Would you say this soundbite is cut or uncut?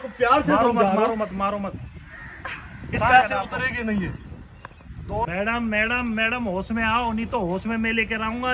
cut